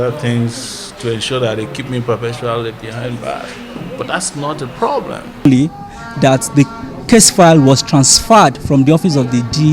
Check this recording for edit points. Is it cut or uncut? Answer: cut